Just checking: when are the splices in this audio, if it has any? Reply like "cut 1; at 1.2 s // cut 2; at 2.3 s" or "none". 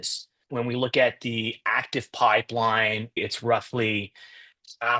cut 1; at 3.2 s

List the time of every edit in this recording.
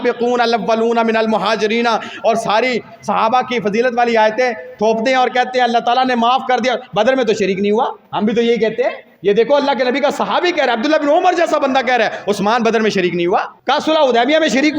cut 1; at 8.0 s // cut 2; at 9.1 s // cut 3; at 13.5 s

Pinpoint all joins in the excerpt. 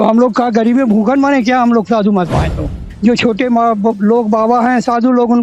cut 1; at 2.9 s

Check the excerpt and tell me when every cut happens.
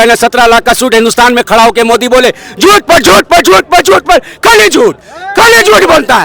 none

